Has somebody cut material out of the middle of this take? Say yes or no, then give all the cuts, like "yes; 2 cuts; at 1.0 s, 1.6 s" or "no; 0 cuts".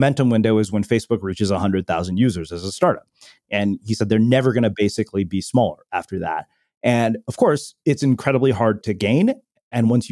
no; 0 cuts